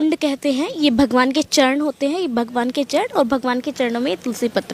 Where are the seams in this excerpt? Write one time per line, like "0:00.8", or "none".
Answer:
none